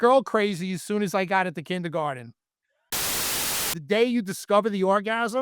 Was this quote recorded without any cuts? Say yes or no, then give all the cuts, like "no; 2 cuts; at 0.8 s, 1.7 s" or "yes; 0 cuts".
no; 1 cut; at 3.2 s